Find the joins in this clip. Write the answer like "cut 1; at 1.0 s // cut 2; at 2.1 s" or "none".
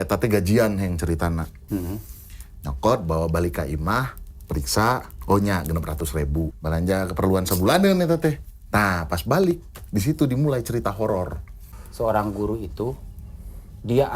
cut 1; at 1.6 s // cut 2; at 6.6 s // cut 3; at 11.2 s